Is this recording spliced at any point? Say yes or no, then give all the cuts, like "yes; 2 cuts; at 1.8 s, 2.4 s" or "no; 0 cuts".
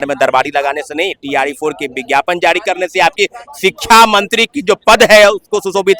no; 0 cuts